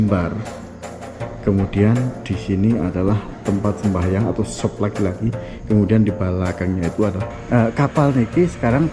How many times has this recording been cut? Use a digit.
1